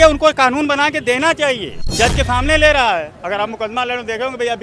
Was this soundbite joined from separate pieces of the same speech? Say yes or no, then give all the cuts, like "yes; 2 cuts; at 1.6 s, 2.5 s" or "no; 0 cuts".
yes; 1 cut; at 1.8 s